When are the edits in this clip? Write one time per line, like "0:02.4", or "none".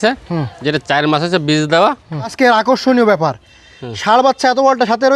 0:02.3